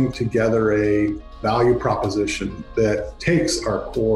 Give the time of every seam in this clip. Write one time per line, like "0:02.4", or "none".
0:01.3